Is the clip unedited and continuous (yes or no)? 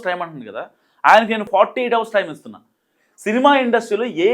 no